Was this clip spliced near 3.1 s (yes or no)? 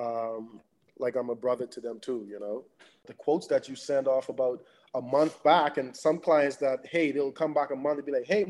yes